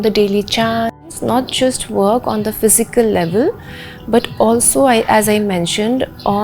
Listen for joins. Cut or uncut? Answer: cut